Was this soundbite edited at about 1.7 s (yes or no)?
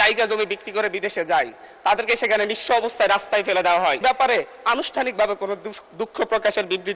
no